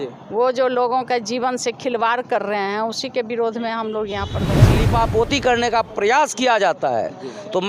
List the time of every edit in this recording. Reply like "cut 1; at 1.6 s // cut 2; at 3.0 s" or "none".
cut 1; at 4.8 s